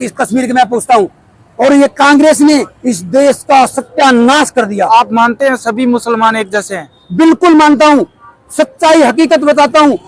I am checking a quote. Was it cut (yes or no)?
no